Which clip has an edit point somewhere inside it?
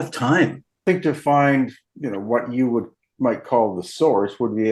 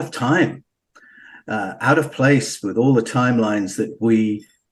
first; 2 cuts; at 0.8 s, 1.8 s

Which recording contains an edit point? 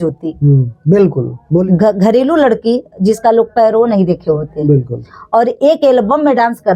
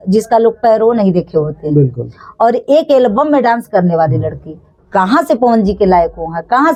first; 1 cut; at 1.6 s

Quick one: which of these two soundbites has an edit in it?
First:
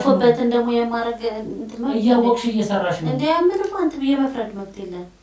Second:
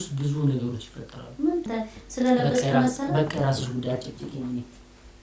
second; 1 cut; at 1.7 s

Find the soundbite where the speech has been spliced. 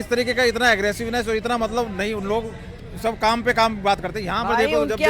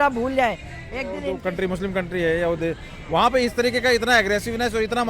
second; 1 cut; at 1.3 s

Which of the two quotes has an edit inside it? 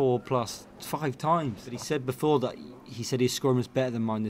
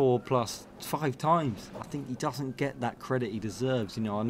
first; 1 cut; at 1.7 s

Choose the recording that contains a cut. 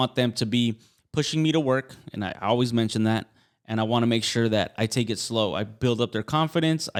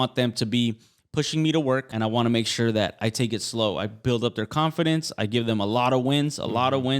second; 1 cut; at 1.9 s

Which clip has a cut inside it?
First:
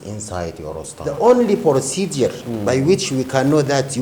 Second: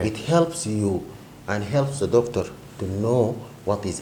first; 1 cut; at 0.9 s

